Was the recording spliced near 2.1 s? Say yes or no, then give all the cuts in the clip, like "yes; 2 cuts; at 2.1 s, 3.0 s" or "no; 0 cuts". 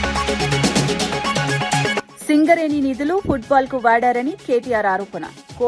yes; 1 cut; at 2.1 s